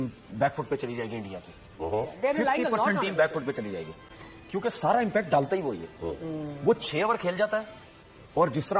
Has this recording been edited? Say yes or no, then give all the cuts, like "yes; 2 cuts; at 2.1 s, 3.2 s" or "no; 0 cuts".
no; 0 cuts